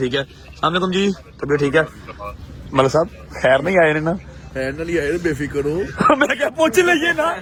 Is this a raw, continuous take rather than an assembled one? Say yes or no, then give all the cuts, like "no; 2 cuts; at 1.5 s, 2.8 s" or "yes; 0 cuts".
yes; 0 cuts